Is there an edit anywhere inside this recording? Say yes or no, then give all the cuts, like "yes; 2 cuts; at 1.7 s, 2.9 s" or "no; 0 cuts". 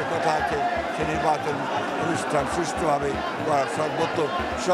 no; 0 cuts